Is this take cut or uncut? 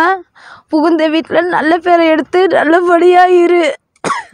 uncut